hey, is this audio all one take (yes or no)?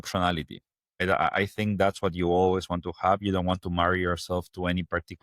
yes